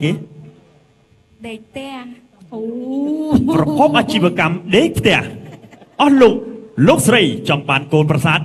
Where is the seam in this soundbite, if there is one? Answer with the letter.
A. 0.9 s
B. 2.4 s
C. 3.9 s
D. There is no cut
D